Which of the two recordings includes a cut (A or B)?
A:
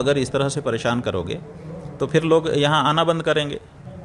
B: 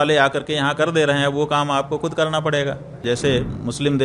B